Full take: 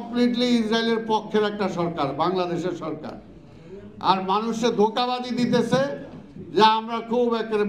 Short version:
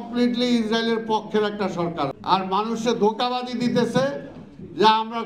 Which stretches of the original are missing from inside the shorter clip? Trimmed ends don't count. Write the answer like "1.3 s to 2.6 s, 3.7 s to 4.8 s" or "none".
2.1 s to 3.9 s